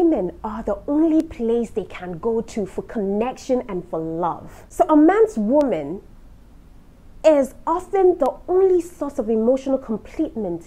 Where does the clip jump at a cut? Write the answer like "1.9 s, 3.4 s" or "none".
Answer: none